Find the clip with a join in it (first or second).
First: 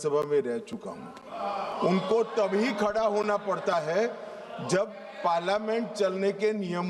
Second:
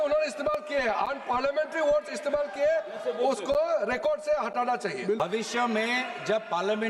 second